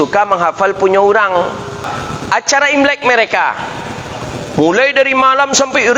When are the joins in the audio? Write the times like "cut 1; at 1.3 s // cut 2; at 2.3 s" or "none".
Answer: cut 1; at 1.9 s